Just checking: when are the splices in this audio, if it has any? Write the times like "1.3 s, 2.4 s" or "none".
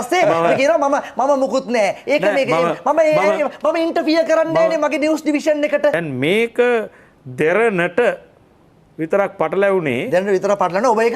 6.0 s